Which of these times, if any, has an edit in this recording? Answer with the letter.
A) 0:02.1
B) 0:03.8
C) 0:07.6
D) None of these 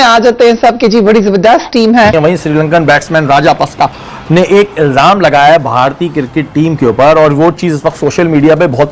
A